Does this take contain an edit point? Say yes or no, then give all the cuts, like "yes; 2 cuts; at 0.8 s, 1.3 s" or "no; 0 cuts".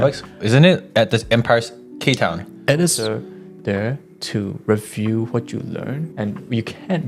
yes; 2 cuts; at 3.0 s, 6.1 s